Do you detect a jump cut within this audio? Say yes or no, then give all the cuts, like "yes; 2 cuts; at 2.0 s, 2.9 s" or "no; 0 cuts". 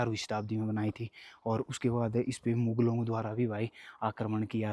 no; 0 cuts